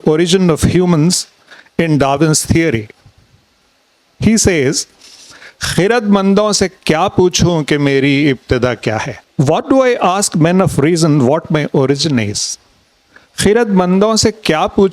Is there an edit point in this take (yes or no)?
yes